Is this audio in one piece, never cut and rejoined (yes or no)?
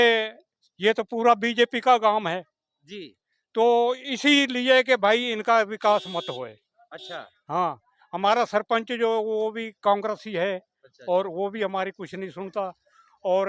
yes